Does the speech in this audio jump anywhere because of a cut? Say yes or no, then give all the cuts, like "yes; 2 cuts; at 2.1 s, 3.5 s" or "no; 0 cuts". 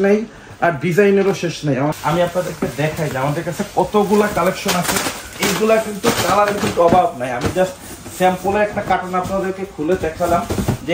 yes; 1 cut; at 1.9 s